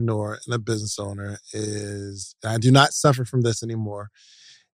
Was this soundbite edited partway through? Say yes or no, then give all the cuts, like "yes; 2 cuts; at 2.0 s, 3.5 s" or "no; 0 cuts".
no; 0 cuts